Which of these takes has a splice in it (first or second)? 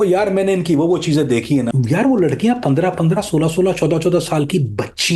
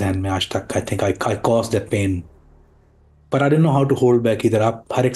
first